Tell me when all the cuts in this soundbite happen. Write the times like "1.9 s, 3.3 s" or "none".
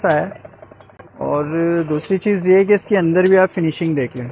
none